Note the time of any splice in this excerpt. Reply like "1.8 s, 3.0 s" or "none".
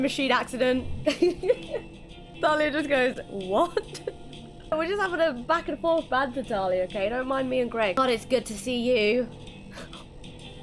0.9 s, 2.4 s, 4.7 s, 8.0 s